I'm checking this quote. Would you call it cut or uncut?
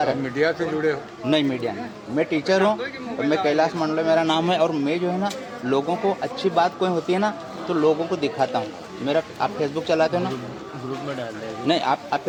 uncut